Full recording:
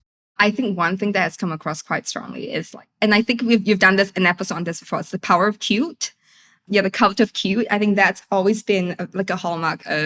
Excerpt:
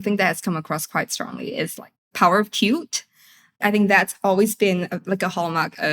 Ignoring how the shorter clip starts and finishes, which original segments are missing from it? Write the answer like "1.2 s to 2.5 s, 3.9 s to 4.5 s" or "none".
2.9 s to 5.1 s, 6.7 s to 7.7 s